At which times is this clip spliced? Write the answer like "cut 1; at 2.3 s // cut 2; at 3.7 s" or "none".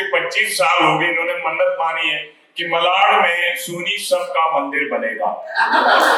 none